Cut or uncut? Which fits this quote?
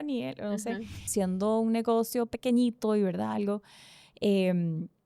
cut